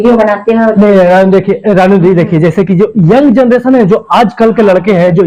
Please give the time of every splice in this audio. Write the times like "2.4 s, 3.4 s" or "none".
none